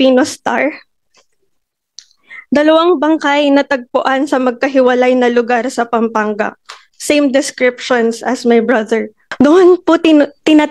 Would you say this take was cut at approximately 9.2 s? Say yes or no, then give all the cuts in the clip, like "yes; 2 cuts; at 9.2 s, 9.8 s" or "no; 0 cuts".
yes; 1 cut; at 9.2 s